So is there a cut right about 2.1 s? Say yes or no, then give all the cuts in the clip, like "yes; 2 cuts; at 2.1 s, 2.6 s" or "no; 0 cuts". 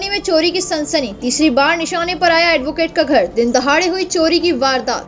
no; 0 cuts